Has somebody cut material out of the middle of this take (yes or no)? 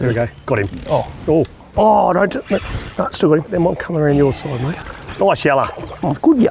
yes